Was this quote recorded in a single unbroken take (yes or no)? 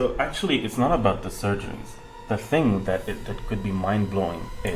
yes